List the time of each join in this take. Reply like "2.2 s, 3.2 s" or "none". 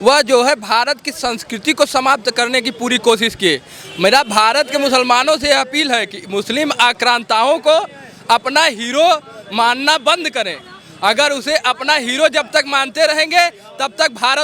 none